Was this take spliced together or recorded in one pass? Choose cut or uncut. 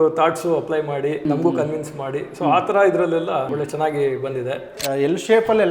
cut